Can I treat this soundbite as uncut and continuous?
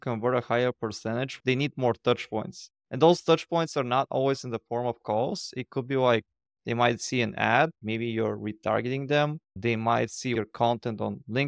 no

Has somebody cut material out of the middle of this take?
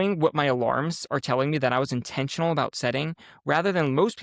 no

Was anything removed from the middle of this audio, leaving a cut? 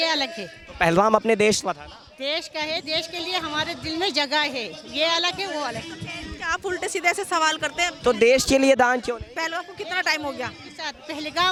no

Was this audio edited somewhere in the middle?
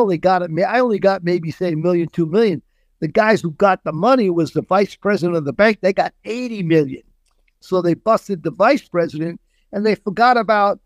no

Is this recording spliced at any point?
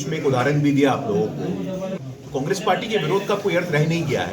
yes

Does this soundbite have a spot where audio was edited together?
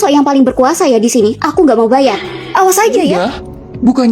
yes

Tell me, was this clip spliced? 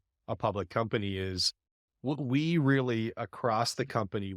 no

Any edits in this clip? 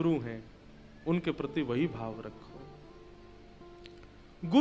no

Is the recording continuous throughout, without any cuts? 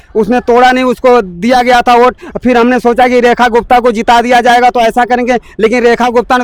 yes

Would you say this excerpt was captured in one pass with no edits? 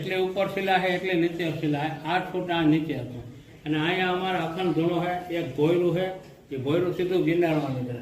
yes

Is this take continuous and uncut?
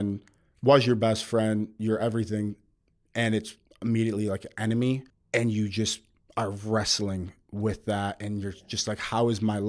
no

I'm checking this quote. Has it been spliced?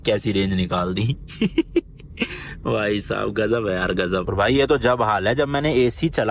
yes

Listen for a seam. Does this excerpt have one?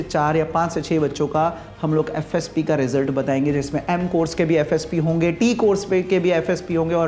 no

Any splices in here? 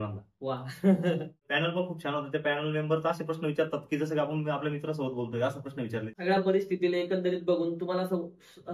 yes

